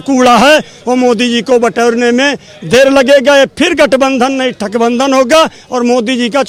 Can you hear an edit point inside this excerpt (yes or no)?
no